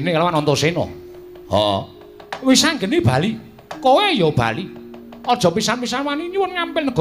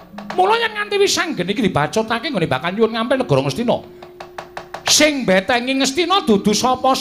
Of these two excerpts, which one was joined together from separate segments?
second; 1 cut; at 2.2 s

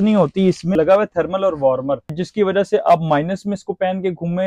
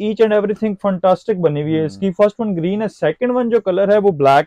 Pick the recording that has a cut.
first; 2 cuts; at 0.7 s, 2.2 s

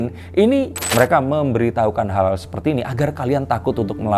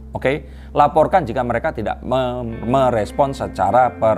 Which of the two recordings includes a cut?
first; 1 cut; at 0.9 s

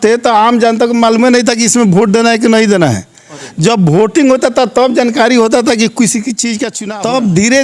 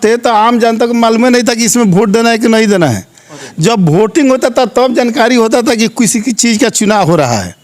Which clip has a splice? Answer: first; 1 cut; at 6.7 s

